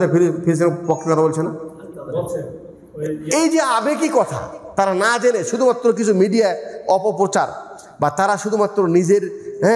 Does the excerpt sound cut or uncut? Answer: uncut